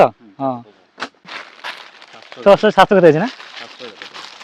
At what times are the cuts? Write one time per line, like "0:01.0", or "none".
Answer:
0:01.3